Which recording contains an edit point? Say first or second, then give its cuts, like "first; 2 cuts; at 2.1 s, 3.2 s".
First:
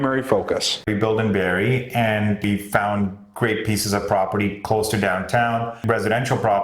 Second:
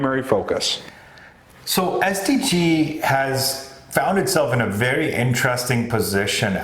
first; 3 cuts; at 0.9 s, 2.4 s, 5.8 s